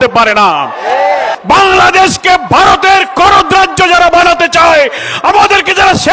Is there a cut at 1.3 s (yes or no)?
yes